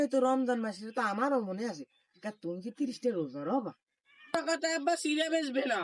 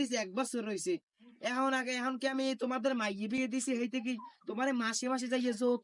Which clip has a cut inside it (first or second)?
first